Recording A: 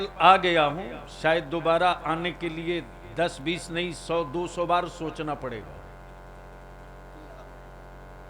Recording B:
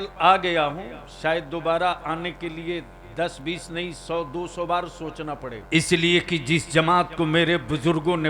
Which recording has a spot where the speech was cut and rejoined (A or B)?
B